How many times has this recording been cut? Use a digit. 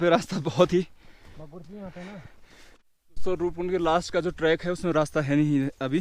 1